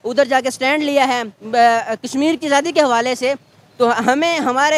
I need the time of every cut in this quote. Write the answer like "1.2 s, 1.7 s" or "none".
none